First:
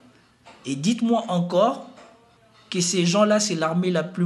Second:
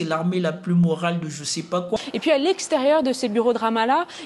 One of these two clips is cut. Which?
second; 1 cut; at 1.9 s

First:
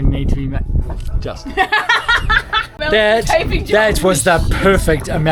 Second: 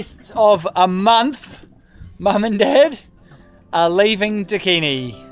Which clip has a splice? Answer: first; 1 cut; at 2.8 s

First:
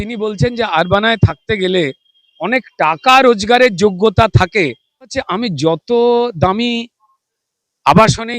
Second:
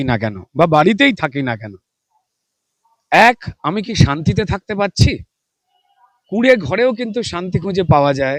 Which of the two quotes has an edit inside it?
first; 1 cut; at 5.2 s

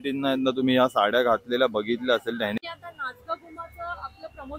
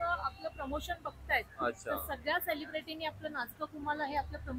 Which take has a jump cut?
first; 1 cut; at 2.6 s

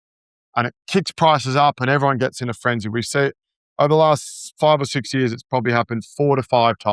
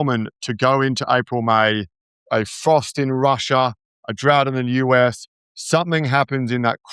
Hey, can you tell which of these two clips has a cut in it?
second; 1 cut; at 2.2 s

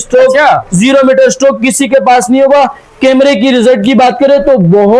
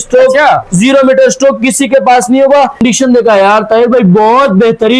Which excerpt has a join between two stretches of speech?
second; 1 cut; at 2.8 s

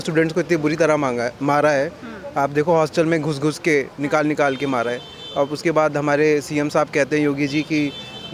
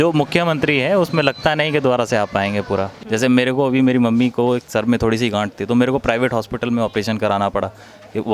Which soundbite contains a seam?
second; 1 cut; at 3.0 s

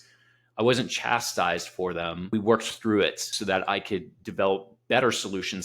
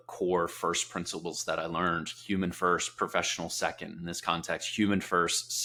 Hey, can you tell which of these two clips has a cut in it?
first; 2 cuts; at 2.3 s, 3.3 s

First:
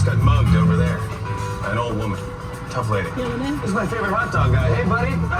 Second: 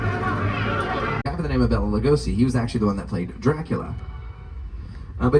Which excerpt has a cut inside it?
second; 1 cut; at 1.2 s

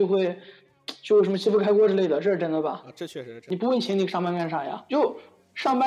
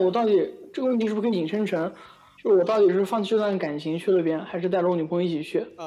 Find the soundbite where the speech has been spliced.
first; 1 cut; at 3.5 s

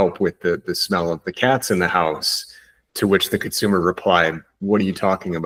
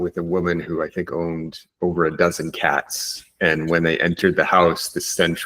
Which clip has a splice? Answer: second; 1 cut; at 4.0 s

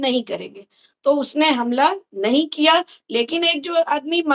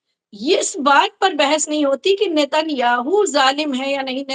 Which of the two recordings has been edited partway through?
first; 1 cut; at 3.0 s

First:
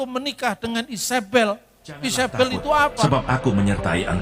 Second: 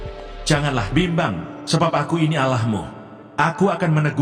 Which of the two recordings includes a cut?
first; 1 cut; at 3.0 s

